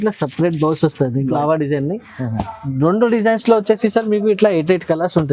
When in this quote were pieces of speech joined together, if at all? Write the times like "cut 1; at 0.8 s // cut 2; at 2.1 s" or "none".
cut 1; at 1.2 s